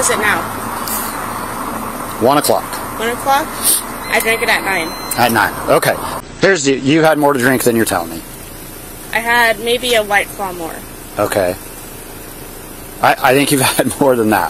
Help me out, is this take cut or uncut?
cut